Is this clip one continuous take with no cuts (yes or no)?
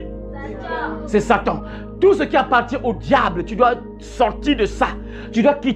yes